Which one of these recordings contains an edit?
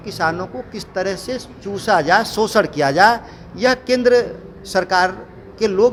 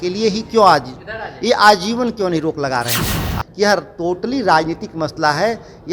second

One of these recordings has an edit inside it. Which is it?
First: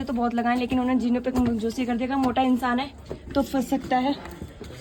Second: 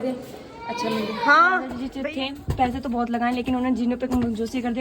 second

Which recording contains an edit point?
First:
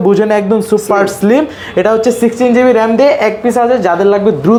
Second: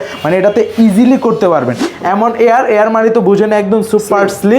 second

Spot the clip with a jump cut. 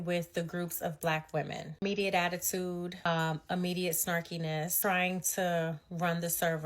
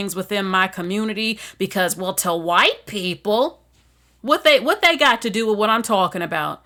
first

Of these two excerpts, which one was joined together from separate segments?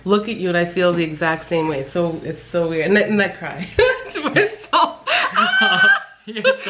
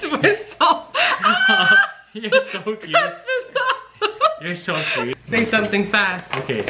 second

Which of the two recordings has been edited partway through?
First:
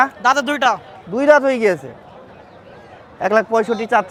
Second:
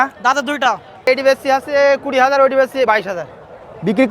second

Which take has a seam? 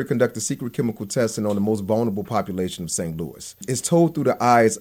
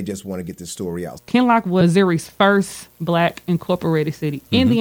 second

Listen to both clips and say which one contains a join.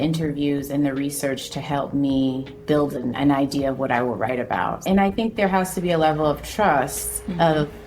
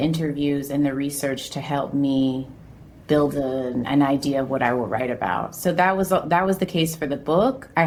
first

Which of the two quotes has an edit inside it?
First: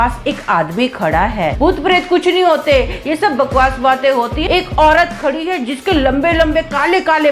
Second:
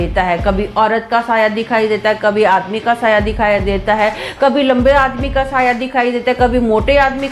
first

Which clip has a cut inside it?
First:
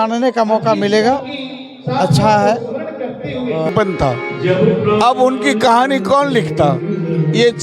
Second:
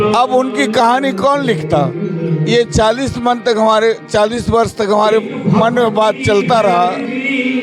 first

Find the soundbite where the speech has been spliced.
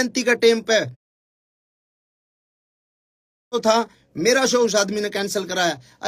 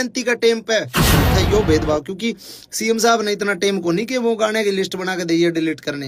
second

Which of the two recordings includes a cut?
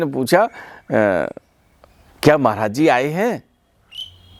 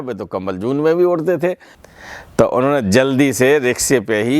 second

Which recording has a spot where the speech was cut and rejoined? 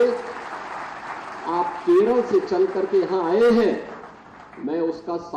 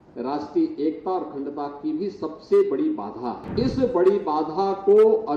second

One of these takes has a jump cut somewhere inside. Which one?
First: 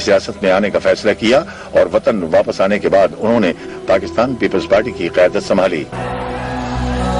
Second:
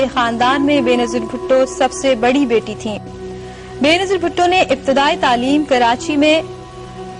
second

